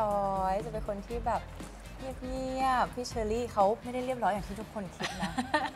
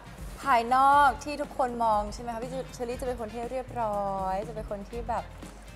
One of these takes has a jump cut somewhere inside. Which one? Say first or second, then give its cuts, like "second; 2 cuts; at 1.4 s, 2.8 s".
first; 2 cuts; at 3.0 s, 3.8 s